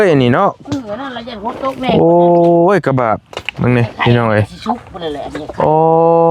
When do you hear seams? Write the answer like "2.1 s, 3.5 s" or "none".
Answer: none